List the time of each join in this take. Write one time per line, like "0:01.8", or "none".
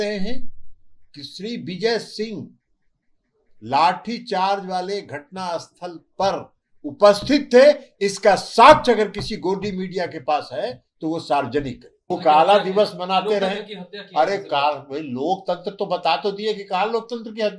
0:11.9